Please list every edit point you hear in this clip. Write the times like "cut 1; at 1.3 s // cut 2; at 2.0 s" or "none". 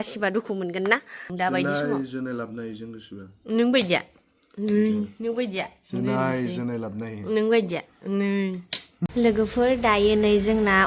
cut 1; at 1.2 s // cut 2; at 9.1 s